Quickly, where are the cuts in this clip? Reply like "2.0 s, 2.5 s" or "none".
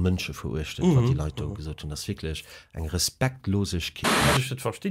3.9 s